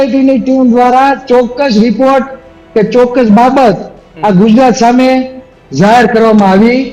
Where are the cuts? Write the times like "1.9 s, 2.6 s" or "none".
none